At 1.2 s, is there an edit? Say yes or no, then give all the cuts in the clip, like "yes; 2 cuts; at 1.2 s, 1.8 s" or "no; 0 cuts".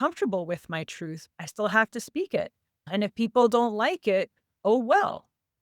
yes; 2 cuts; at 1.2 s, 2.8 s